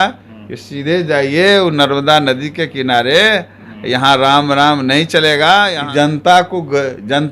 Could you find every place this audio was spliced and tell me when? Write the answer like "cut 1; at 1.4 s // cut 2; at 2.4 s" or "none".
cut 1; at 5.8 s

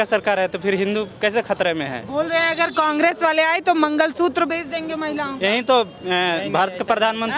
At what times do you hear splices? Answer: none

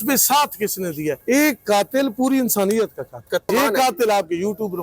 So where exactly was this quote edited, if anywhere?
cut 1; at 1.2 s // cut 2; at 3.5 s

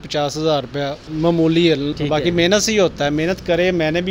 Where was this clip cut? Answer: cut 1; at 1.9 s

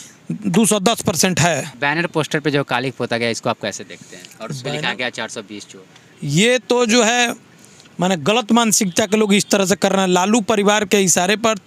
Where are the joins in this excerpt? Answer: cut 1; at 1.7 s

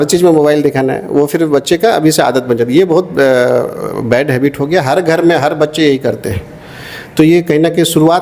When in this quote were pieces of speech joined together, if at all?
none

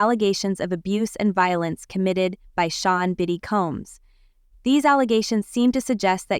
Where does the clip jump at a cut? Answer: none

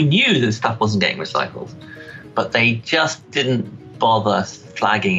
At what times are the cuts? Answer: none

